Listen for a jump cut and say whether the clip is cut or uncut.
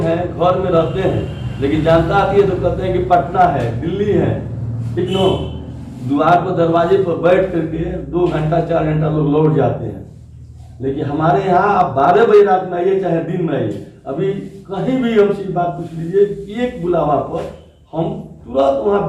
uncut